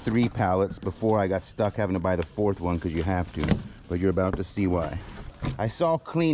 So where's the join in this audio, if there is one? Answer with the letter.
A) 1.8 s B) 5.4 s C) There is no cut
B